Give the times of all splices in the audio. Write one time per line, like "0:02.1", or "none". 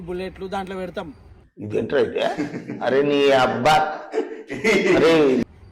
none

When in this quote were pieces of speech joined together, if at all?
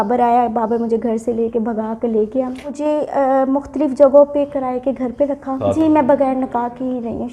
0:02.7
0:05.6

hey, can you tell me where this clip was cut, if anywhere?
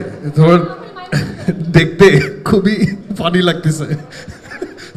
none

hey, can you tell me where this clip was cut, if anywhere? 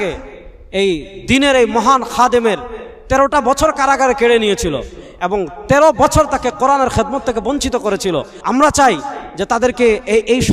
0:08.3

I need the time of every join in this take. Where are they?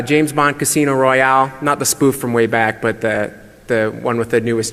0:01.9

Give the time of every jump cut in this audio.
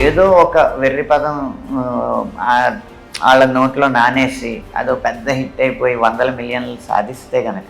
none

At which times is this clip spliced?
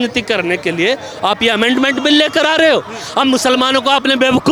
none

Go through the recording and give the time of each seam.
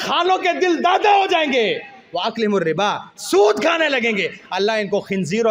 none

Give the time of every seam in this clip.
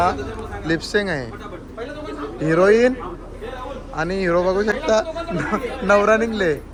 none

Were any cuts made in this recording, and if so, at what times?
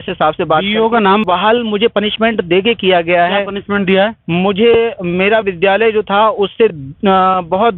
0:01.2

